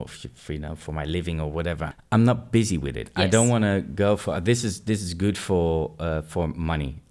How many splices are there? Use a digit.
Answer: 1